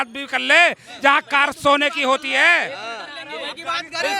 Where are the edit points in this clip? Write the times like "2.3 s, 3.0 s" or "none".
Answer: none